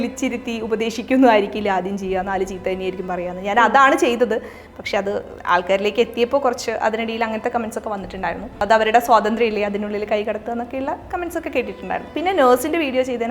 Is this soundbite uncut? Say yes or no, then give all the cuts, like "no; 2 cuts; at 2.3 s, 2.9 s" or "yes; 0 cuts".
no; 2 cuts; at 8.6 s, 12.1 s